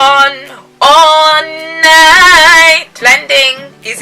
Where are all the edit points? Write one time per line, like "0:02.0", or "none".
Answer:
0:02.9